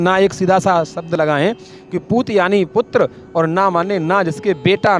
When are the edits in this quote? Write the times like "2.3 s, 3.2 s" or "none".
none